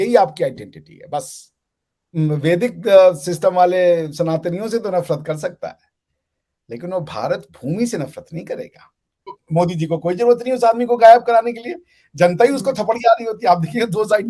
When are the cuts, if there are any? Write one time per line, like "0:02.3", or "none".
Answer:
0:02.1
0:09.3